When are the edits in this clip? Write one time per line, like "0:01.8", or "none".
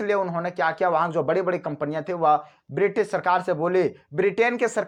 none